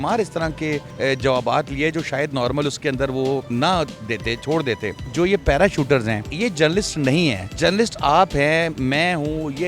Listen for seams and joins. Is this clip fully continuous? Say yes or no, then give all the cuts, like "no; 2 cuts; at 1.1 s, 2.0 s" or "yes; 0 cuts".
no; 5 cuts; at 0.9 s, 3.5 s, 5.0 s, 6.3 s, 7.5 s